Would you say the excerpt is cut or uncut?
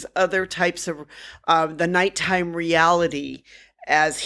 uncut